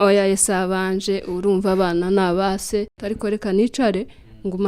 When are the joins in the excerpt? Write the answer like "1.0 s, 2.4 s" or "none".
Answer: 3.0 s